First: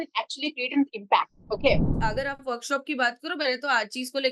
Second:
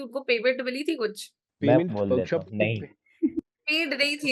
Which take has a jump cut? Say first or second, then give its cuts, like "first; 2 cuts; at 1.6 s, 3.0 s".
first; 1 cut; at 1.9 s